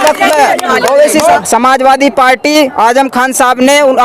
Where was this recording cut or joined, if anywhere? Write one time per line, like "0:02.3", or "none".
0:01.4